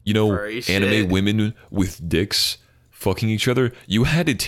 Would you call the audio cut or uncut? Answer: uncut